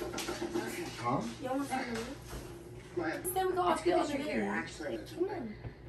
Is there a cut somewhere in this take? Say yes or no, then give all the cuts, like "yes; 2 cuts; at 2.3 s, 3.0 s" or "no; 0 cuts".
yes; 2 cuts; at 3.3 s, 5.0 s